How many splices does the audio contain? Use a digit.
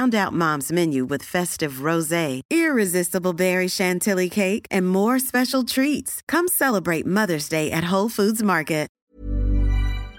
1